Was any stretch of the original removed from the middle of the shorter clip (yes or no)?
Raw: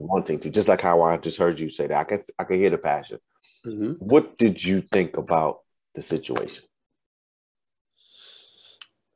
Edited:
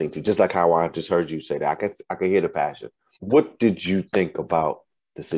yes